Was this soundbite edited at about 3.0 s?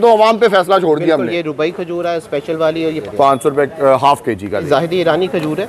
yes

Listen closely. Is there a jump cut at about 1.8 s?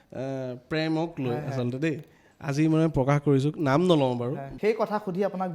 no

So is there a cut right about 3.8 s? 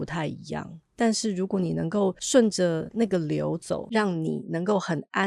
yes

